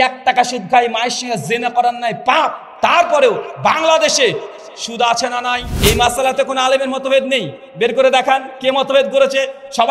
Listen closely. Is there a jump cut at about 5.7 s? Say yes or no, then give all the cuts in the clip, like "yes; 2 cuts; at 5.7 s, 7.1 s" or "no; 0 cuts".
yes; 1 cut; at 5.7 s